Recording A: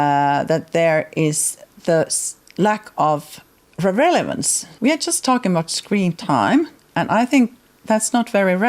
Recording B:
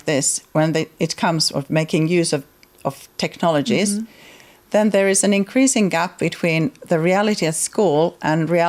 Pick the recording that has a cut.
A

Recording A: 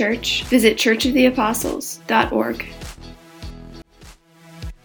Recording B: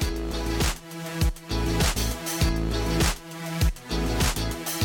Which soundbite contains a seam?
A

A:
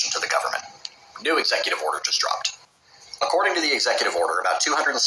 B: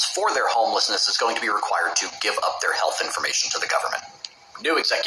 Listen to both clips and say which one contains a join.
A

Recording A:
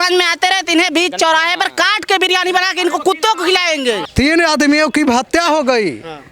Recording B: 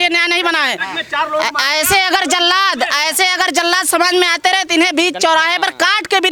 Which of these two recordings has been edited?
A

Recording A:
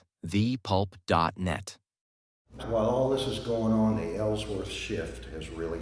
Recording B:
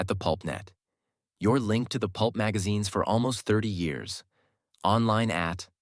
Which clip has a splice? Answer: A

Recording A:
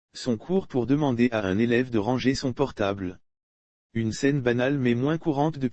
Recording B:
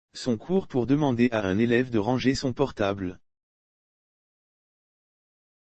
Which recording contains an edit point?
A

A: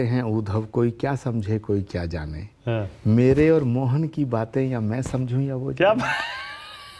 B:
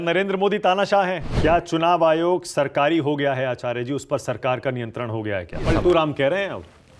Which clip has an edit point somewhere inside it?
B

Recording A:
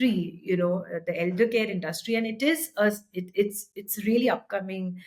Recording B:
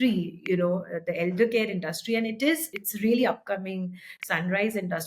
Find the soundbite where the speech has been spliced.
B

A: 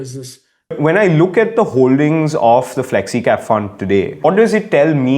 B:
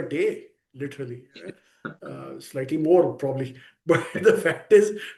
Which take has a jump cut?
A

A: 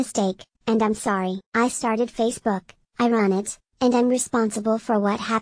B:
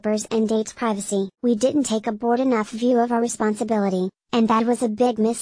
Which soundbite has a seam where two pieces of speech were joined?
A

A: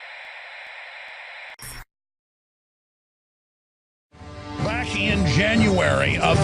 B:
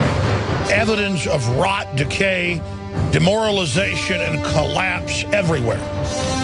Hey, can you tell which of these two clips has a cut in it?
A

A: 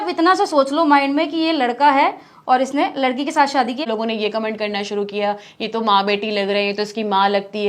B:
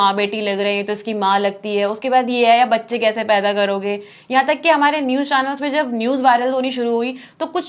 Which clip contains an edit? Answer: A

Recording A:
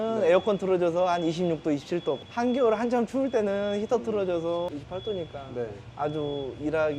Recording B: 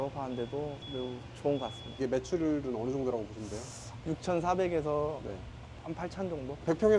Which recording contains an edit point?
B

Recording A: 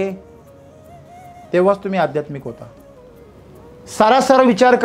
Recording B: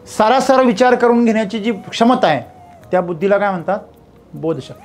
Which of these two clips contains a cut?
A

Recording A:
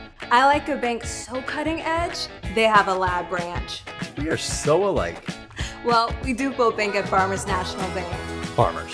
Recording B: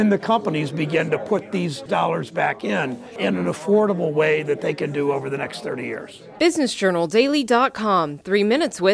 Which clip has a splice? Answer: B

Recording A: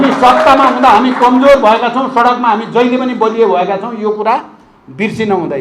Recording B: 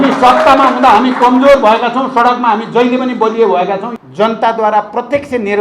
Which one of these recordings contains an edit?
B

